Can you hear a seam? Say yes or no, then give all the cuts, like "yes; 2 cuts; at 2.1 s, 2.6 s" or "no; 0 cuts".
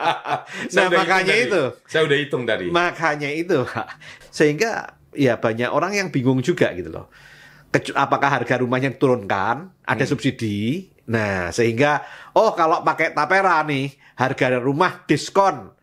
yes; 1 cut; at 4.2 s